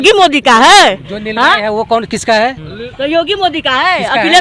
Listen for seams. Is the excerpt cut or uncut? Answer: uncut